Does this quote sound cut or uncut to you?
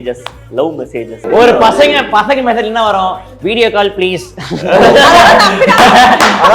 cut